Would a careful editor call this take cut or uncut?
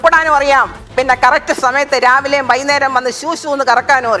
uncut